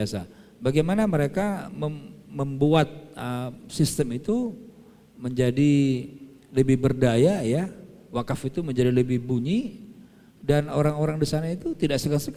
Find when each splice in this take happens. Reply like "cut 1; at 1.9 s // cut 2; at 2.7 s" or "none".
none